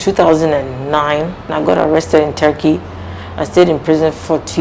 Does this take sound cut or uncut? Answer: cut